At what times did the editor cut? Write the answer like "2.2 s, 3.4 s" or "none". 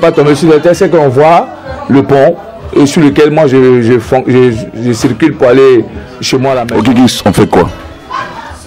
6.6 s